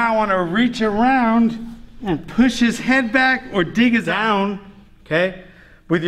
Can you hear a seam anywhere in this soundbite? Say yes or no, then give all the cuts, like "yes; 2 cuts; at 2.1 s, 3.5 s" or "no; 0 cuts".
yes; 1 cut; at 4.1 s